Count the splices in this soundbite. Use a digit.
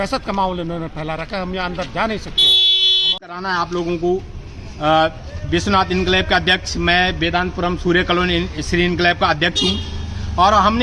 0